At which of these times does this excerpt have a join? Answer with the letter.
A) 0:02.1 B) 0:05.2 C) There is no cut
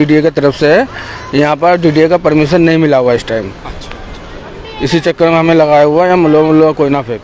C